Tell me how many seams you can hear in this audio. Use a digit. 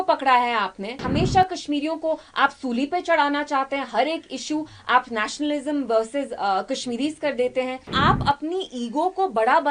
2